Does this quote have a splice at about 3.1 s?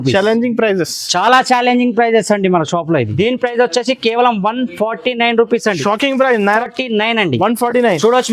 yes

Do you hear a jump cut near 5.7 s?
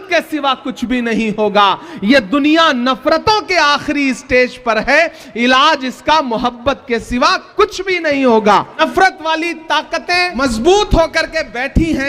no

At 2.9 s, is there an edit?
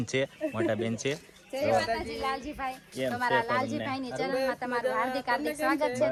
no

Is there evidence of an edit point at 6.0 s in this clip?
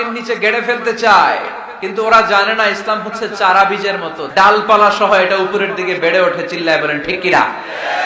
no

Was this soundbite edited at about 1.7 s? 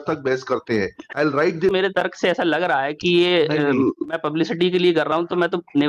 yes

